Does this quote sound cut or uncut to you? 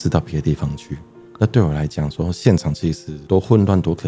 uncut